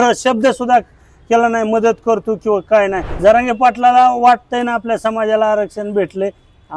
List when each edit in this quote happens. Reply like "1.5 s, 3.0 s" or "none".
3.1 s